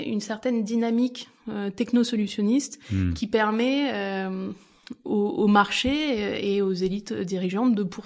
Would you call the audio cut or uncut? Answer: uncut